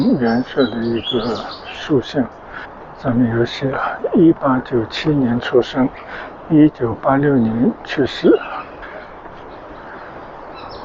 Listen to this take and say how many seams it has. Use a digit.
0